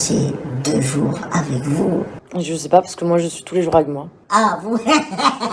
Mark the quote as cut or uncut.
uncut